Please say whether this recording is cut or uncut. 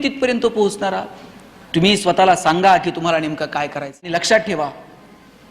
cut